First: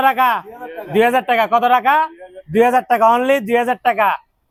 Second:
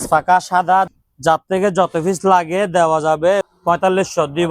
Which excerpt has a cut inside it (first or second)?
second